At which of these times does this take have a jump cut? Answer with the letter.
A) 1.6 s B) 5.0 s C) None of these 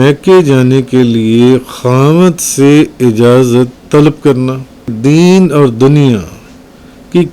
B